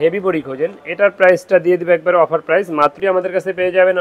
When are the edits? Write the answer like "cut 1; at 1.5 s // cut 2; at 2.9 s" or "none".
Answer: cut 1; at 2.9 s